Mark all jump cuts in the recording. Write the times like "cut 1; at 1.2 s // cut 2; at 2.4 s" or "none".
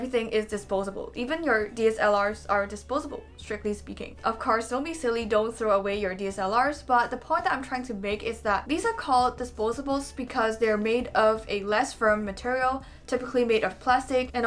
none

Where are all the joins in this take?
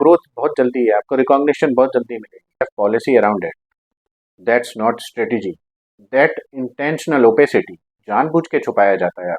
cut 1; at 2.7 s

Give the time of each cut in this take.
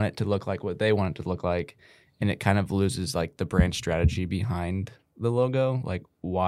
none

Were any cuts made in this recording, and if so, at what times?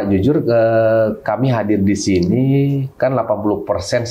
none

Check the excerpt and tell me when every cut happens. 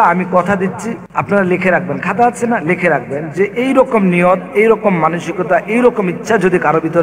cut 1; at 1.0 s

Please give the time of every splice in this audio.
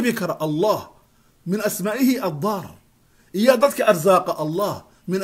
none

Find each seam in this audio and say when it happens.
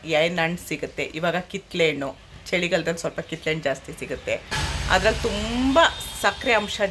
cut 1; at 4.7 s

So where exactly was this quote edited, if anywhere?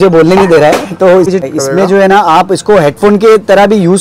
cut 1; at 1.3 s

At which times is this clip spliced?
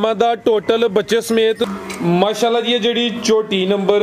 cut 1; at 1.7 s

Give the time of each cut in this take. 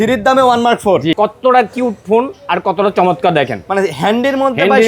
cut 1; at 1.1 s

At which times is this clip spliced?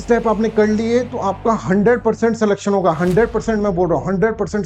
none

